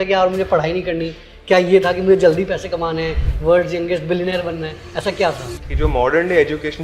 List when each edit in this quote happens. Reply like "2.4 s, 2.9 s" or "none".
5.6 s